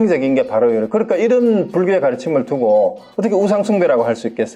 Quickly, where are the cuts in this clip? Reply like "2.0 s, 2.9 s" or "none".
none